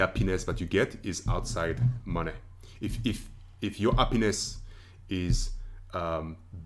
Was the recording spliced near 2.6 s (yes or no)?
no